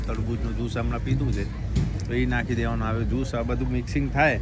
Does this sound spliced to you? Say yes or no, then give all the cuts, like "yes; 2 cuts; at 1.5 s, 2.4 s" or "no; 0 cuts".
no; 0 cuts